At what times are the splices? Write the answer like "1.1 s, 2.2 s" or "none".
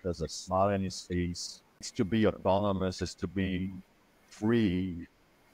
1.9 s